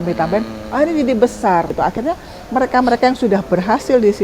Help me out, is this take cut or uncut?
cut